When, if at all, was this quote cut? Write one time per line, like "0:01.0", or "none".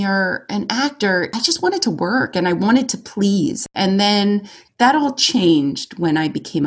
0:01.4
0:03.7